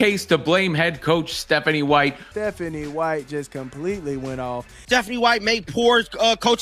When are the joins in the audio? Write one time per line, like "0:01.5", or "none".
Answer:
0:02.2
0:04.7